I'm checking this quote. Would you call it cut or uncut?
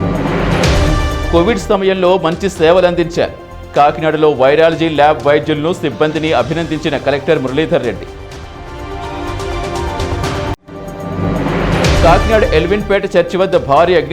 cut